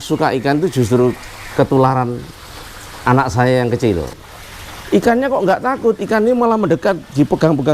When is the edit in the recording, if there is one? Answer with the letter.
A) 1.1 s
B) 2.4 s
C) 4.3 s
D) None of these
C